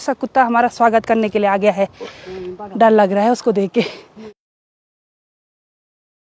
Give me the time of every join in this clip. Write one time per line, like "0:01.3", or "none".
none